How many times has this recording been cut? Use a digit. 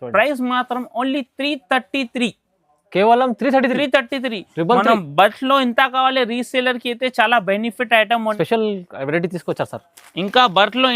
1